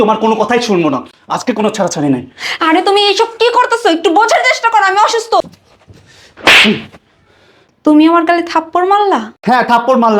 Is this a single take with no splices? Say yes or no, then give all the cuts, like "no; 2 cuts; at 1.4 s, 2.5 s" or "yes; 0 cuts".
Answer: no; 1 cut; at 5.4 s